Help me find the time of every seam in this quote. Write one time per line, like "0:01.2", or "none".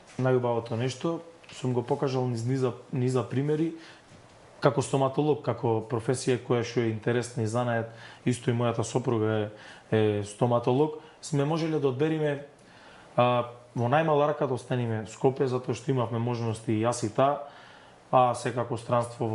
none